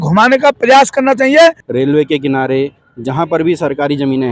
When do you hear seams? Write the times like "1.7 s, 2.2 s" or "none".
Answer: 1.6 s